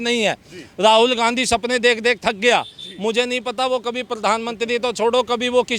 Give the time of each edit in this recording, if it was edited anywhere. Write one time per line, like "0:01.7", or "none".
none